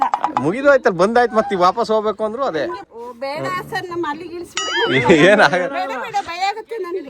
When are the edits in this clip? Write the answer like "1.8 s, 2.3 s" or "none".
2.8 s